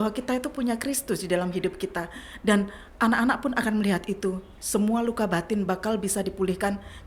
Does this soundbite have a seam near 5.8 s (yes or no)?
no